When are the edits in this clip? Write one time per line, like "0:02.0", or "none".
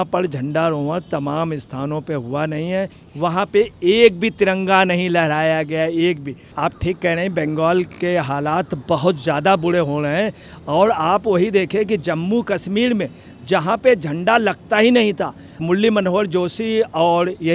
0:03.0
0:06.5